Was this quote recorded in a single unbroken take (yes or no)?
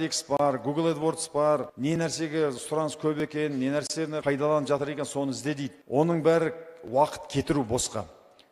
no